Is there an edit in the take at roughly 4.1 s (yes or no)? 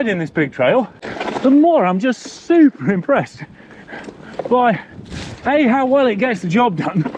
no